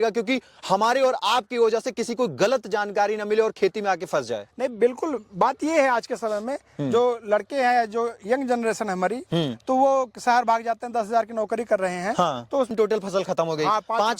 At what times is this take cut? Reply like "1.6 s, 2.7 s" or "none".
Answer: 12.7 s